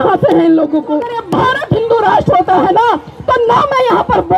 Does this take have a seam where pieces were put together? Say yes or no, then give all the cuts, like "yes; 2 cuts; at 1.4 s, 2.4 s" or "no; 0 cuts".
yes; 1 cut; at 1.2 s